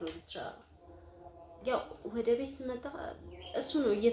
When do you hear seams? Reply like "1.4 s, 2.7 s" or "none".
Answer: none